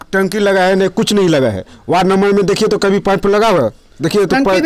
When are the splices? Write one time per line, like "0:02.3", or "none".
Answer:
none